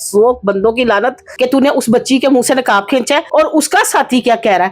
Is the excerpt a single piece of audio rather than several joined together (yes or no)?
no